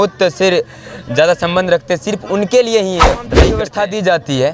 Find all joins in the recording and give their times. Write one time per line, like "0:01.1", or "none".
0:03.4